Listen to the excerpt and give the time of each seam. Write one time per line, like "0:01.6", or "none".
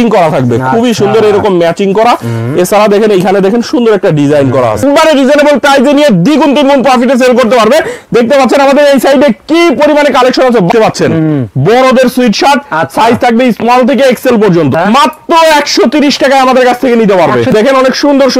0:04.8
0:10.7
0:14.7
0:17.5